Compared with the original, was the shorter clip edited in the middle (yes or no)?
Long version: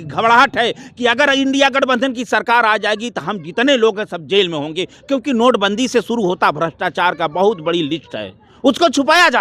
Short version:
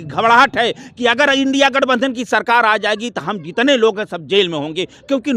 no